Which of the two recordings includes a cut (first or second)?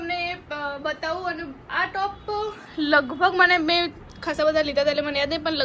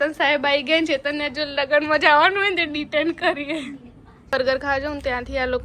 second